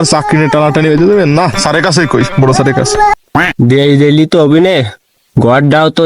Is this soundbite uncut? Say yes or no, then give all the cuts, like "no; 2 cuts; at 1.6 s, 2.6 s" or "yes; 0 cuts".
no; 1 cut; at 3.1 s